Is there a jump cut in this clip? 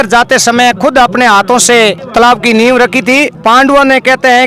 yes; 2 cuts; at 2.0 s, 3.3 s

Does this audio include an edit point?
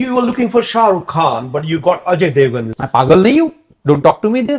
yes; 1 cut; at 2.8 s

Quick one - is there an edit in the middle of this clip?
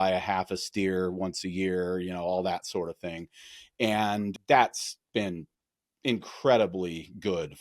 yes; 1 cut; at 4.4 s

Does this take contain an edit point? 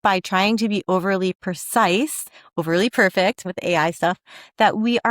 yes; 1 cut; at 3.5 s

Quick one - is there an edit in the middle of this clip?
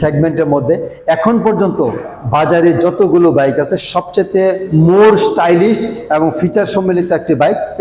no; 0 cuts

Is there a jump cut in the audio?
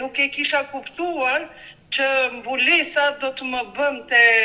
no; 0 cuts

